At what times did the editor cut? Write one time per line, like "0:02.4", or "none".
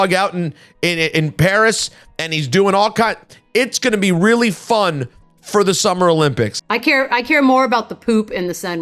0:06.6

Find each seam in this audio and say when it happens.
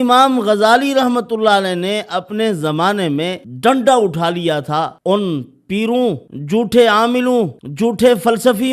0:03.5
0:04.9
0:06.3
0:07.6

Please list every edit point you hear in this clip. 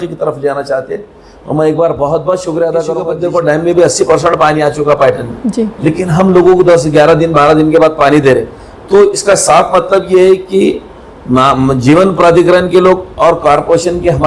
0:03.2

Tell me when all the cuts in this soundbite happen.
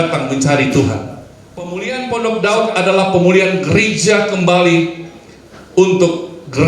0:01.8

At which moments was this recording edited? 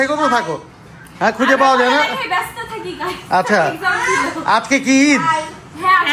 none

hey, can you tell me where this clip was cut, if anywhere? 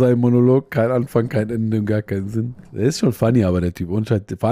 0:02.6

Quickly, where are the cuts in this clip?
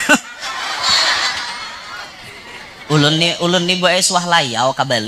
0:02.7

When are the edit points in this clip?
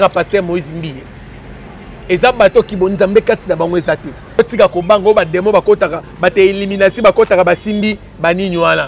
0:04.4

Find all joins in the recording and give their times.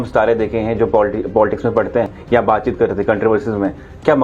0:02.2

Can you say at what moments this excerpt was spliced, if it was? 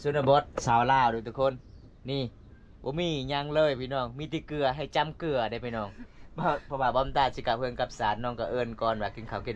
none

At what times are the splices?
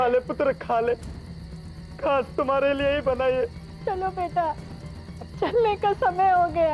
0:03.7

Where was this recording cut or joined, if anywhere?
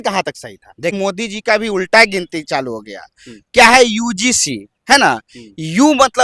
0:00.9

